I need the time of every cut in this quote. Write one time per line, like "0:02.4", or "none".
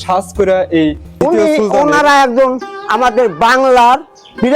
0:01.1

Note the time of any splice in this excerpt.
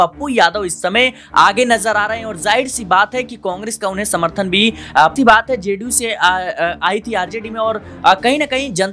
0:05.1

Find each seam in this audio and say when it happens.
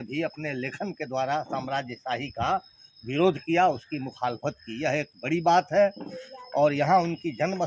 none

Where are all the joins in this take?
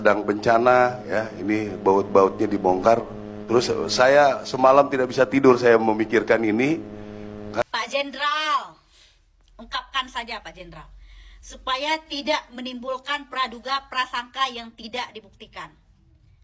0:03.3
0:07.6

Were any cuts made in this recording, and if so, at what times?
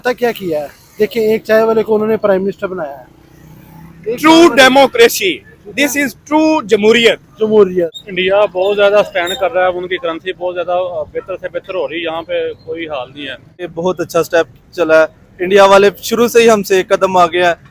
0:08.0
0:13.7

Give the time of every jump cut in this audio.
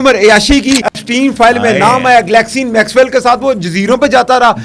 0:00.9

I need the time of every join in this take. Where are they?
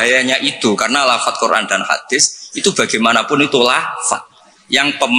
none

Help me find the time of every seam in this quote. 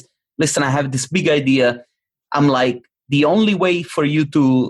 0:02.9

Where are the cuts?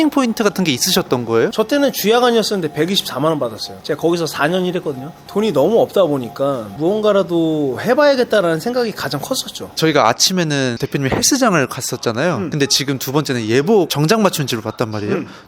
0:01.5
0:09.6

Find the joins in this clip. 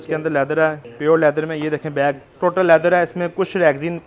0:00.9
0:02.3

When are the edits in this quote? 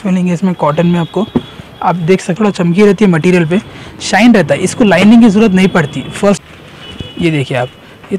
0:02.4
0:06.4

